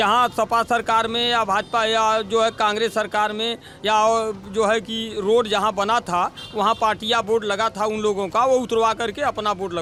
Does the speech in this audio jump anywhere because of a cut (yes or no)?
no